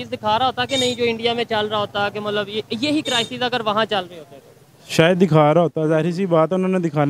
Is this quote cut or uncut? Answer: uncut